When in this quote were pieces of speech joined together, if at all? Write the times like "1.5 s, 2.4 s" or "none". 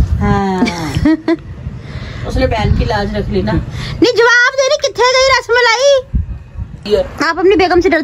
1.1 s, 6.9 s